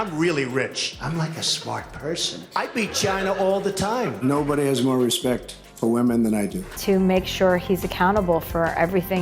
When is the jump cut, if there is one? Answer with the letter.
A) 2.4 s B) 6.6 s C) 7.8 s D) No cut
B